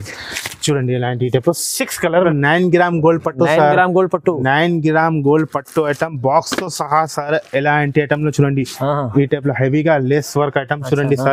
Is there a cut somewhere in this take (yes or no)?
yes